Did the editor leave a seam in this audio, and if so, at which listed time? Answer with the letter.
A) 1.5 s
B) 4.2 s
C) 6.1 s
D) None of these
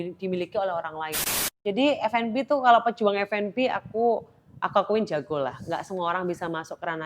A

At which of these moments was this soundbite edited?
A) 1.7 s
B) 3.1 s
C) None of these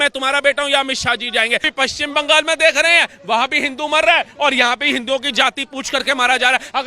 A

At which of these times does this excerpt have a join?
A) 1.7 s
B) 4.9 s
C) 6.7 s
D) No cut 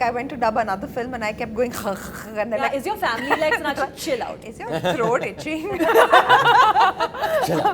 D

